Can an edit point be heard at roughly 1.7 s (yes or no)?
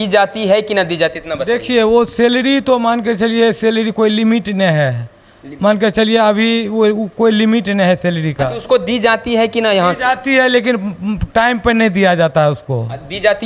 no